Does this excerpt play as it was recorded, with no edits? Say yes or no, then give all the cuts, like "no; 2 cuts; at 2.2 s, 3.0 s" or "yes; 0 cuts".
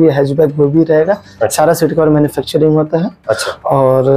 yes; 0 cuts